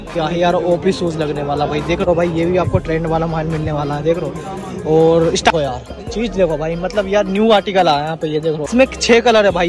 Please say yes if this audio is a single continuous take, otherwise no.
no